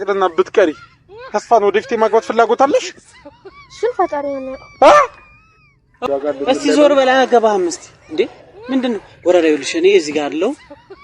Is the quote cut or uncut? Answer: cut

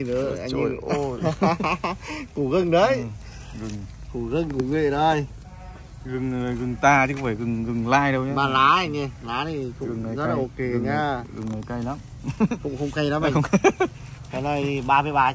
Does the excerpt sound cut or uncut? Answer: uncut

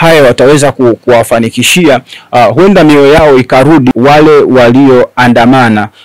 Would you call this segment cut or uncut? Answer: cut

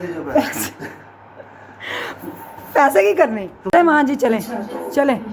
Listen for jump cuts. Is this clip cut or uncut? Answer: cut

